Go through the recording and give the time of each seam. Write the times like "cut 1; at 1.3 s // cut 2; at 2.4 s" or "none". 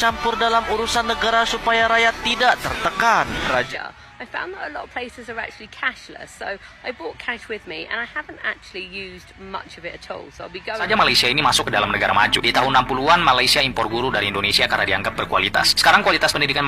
cut 1; at 3.7 s // cut 2; at 10.9 s